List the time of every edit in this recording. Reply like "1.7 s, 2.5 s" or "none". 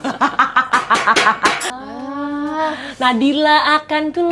1.7 s

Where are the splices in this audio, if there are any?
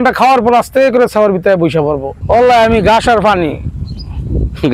2.1 s

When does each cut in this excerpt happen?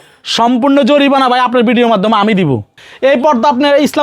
2.8 s

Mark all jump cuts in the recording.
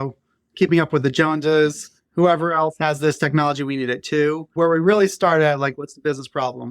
4.5 s

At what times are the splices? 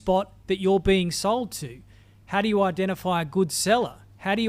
none

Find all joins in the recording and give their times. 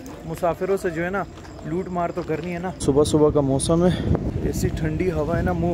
2.8 s, 4.3 s

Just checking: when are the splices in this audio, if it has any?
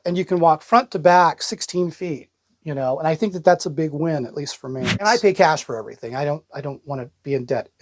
4.8 s

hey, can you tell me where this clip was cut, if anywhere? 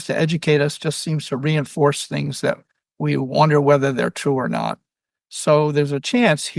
none

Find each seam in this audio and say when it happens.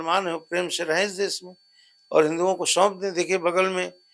none

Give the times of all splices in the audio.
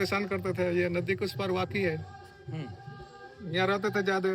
none

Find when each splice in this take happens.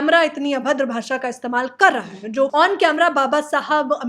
2.5 s

